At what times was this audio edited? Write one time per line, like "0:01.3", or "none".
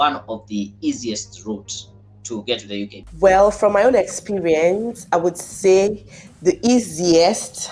0:03.0